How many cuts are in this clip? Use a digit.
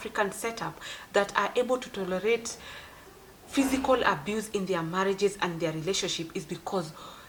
0